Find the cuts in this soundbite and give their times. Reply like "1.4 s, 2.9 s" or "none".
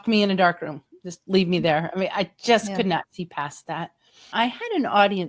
4.3 s